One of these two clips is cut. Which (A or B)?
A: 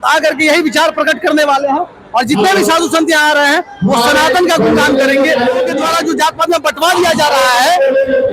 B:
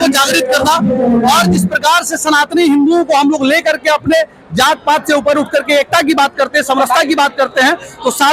A